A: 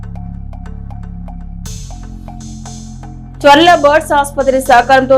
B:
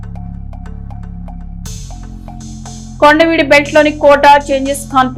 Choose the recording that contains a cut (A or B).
A